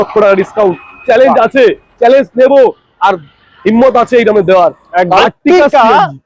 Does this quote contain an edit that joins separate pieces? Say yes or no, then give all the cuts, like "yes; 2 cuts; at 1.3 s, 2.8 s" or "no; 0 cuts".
yes; 1 cut; at 5.2 s